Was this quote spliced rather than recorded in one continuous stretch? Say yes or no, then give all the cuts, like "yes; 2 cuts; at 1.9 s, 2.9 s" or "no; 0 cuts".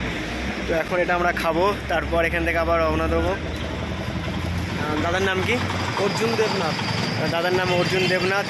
no; 0 cuts